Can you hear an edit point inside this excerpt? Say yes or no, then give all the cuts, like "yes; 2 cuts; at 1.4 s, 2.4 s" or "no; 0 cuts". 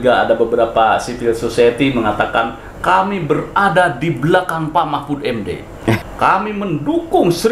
yes; 1 cut; at 6.0 s